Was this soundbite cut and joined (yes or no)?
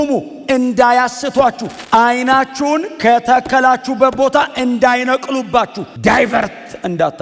yes